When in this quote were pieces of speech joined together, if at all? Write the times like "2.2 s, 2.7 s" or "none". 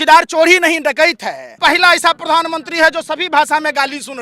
1.6 s